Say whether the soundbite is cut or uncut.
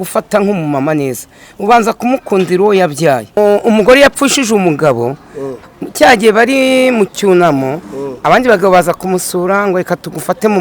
cut